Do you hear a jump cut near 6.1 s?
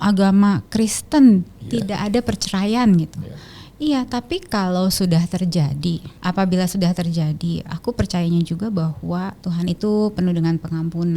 yes; 2 cuts; at 6.1 s, 9.4 s

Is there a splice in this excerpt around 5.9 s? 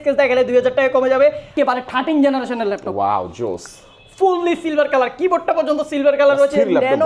no; 1 cut; at 1.5 s

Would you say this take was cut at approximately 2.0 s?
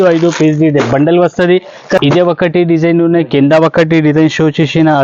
yes; 1 cut; at 2.0 s

